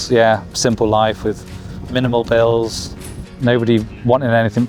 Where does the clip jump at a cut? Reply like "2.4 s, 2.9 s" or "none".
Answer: none